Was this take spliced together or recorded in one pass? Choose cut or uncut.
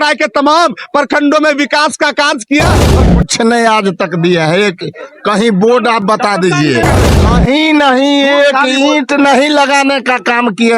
cut